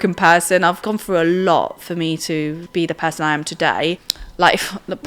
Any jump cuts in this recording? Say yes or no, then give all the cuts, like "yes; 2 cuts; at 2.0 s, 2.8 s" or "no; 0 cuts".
yes; 3 cuts; at 0.8 s, 2.6 s, 4.1 s